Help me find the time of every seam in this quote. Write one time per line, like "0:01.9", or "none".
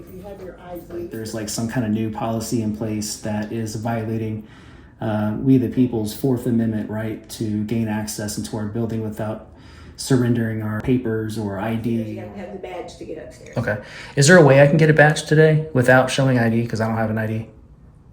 0:01.2
0:10.8
0:12.2